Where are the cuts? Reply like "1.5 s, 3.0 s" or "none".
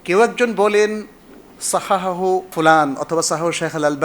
2.5 s